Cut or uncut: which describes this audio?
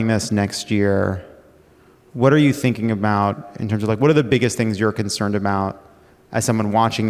uncut